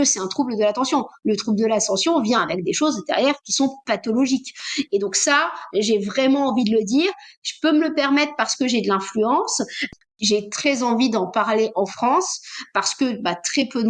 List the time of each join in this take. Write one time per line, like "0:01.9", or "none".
0:10.1